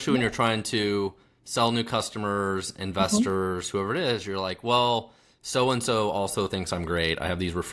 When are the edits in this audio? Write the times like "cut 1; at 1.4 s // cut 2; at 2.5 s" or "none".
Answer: none